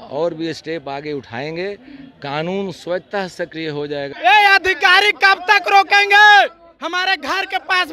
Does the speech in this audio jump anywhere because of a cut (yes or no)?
yes